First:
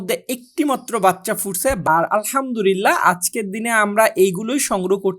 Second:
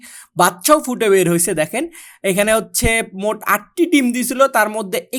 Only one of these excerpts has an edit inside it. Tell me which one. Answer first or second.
first